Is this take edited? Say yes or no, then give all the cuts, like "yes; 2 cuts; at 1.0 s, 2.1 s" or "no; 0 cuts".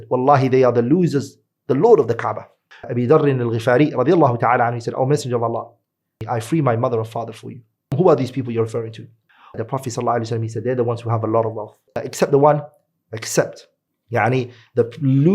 yes; 5 cuts; at 2.8 s, 6.1 s, 7.9 s, 9.6 s, 12.0 s